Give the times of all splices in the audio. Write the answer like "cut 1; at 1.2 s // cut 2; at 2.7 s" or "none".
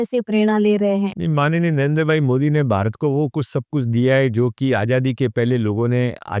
cut 1; at 1.1 s